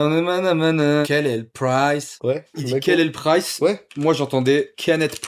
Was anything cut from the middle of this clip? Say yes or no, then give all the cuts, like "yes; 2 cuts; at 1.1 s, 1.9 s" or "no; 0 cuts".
yes; 2 cuts; at 1.1 s, 2.6 s